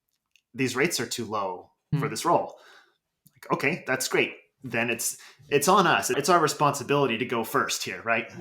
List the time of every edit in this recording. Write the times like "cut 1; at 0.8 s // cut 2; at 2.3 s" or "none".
cut 1; at 1.9 s